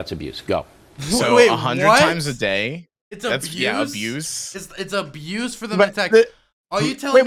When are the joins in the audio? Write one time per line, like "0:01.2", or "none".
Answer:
none